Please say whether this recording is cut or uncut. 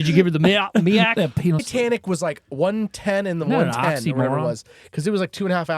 cut